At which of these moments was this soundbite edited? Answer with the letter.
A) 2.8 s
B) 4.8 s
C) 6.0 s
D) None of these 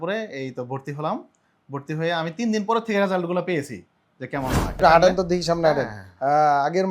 B